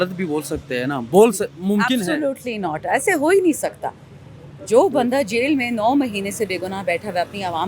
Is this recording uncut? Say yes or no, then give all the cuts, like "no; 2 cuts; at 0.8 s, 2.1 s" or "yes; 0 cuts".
yes; 0 cuts